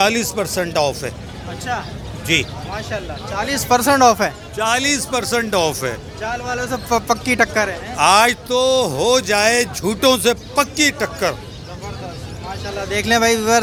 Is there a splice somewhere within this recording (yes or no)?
no